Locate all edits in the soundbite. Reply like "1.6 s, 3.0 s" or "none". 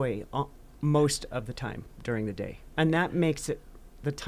2.6 s